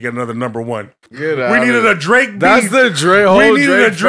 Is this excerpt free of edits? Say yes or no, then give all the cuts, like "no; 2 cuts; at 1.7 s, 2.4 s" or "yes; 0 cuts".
no; 1 cut; at 1.0 s